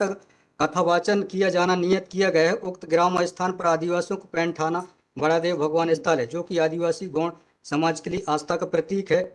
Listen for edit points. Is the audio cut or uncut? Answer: uncut